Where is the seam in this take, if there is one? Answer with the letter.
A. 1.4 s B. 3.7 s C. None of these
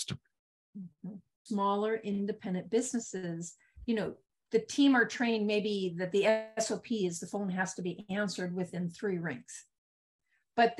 A